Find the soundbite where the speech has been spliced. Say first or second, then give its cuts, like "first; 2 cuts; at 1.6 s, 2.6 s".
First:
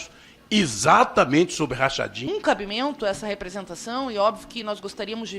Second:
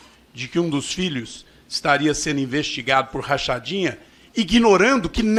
first; 1 cut; at 2.3 s